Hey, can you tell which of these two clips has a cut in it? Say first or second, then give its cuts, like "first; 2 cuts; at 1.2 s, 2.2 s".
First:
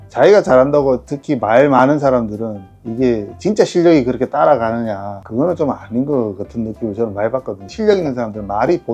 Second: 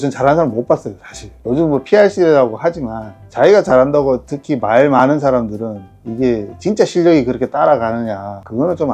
first; 1 cut; at 7.7 s